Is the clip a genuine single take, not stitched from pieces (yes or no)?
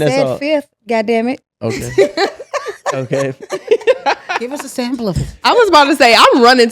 yes